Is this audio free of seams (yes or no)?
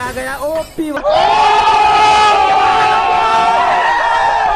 no